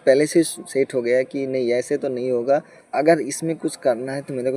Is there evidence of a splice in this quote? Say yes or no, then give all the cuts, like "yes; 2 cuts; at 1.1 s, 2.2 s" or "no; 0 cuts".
yes; 1 cut; at 2.8 s